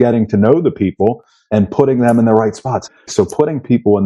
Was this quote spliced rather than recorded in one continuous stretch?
yes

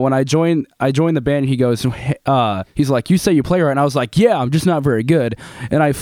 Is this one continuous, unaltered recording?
no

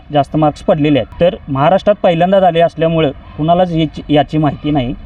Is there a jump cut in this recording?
yes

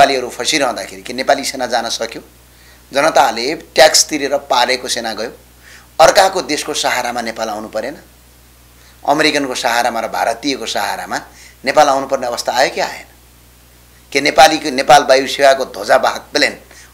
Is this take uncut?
yes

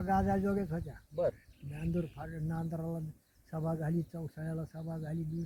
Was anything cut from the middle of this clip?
no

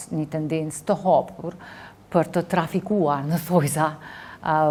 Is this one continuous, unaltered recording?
yes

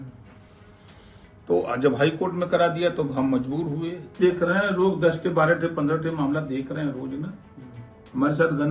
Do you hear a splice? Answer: yes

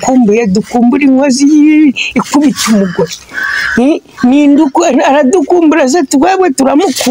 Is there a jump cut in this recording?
no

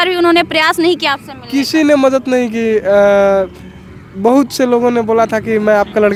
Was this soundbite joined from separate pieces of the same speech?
no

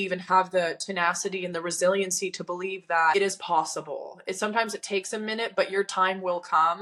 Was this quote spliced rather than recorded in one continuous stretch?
no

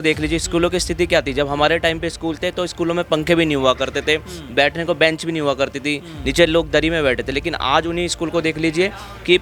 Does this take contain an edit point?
no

